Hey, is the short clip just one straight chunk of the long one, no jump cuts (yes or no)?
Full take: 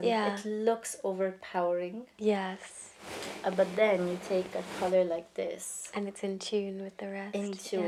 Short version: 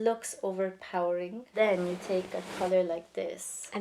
no